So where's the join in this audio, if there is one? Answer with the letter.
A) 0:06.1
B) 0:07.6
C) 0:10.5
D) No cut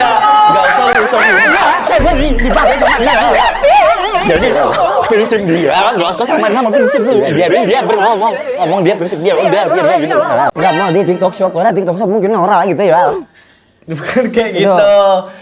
C